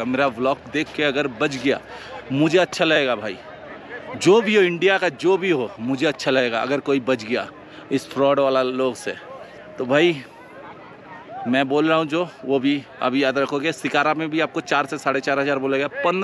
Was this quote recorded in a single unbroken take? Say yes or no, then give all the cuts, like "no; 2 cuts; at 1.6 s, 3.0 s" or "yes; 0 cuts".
yes; 0 cuts